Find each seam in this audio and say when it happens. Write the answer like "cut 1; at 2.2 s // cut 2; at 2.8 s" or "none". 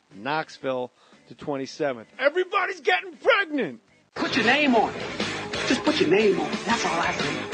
cut 1; at 2.3 s